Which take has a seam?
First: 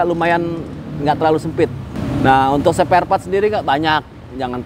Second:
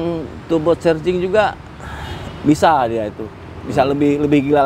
first; 1 cut; at 1.9 s

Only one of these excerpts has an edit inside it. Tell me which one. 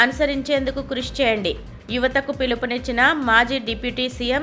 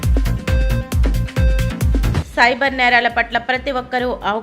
second; 1 cut; at 2.2 s

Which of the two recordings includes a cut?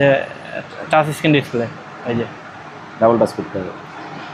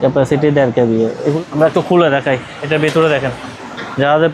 second; 1 cut; at 1.4 s

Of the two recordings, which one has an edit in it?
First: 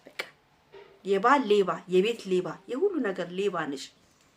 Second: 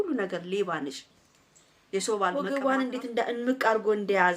second; 1 cut; at 2.5 s

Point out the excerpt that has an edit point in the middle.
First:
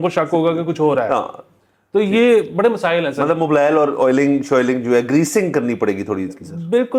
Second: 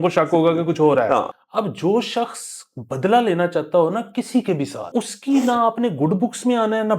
second; 2 cuts; at 1.4 s, 4.9 s

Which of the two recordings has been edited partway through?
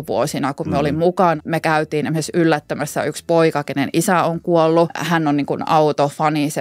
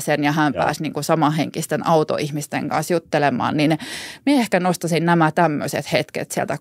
first; 2 cuts; at 1.4 s, 5.0 s

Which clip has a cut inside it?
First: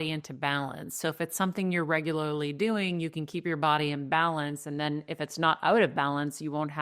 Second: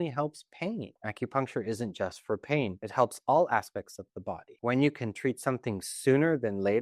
second; 3 cuts; at 1.0 s, 2.8 s, 4.4 s

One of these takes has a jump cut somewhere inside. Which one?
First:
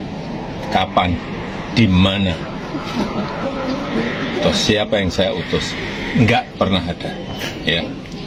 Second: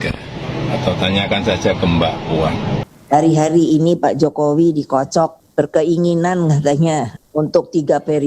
second; 3 cuts; at 2.9 s, 5.4 s, 7.2 s

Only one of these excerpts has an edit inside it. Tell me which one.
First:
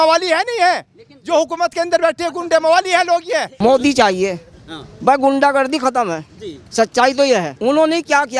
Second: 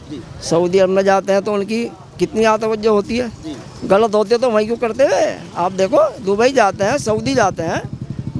first; 2 cuts; at 3.5 s, 7.5 s

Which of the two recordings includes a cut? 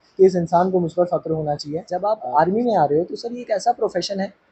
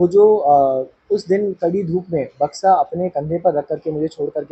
first; 1 cut; at 1.9 s

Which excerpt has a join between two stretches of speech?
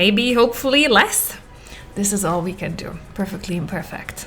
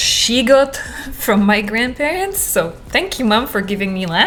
first; 1 cut; at 3.0 s

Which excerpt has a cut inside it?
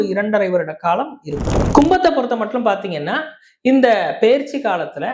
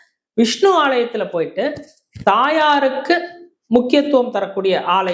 first; 1 cut; at 1.7 s

